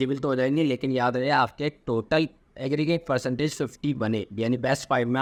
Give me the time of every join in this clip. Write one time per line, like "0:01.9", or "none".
none